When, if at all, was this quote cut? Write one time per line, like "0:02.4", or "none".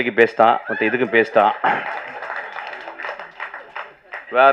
none